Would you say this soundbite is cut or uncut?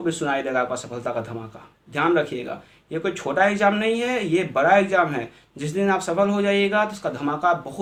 uncut